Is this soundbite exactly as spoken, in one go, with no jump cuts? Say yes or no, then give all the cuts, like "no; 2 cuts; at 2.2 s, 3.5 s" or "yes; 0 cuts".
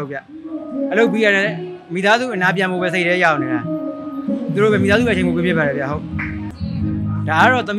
no; 1 cut; at 6.5 s